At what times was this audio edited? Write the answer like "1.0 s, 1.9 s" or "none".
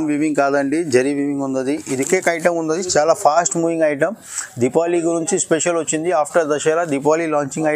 2.1 s